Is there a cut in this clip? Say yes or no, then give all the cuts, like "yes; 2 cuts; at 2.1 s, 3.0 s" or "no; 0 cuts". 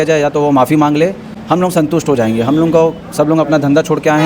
no; 0 cuts